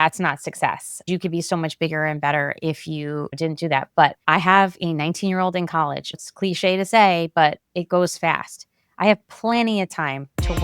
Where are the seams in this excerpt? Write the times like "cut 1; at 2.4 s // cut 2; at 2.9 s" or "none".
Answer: cut 1; at 1.0 s // cut 2; at 3.3 s // cut 3; at 4.2 s // cut 4; at 6.2 s